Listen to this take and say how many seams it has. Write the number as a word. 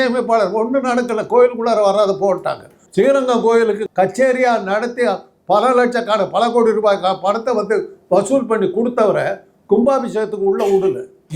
zero